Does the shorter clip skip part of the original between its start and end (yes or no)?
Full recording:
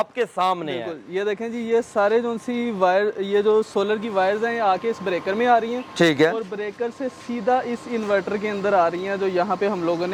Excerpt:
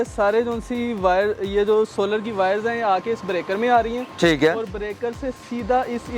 no